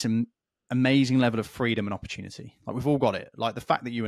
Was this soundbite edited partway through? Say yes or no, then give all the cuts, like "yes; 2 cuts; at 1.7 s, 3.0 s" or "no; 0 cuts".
no; 0 cuts